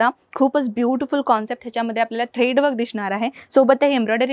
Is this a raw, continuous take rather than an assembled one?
yes; 0 cuts

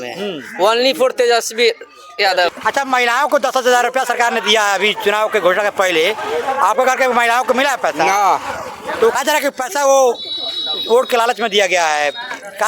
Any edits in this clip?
yes; 2 cuts; at 2.5 s, 9.1 s

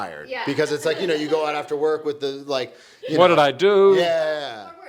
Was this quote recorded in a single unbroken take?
yes; 0 cuts

